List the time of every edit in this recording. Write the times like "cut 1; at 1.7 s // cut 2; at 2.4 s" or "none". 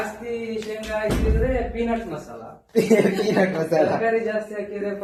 none